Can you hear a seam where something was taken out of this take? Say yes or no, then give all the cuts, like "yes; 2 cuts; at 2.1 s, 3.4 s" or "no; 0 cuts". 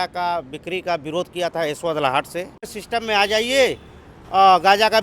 yes; 1 cut; at 2.8 s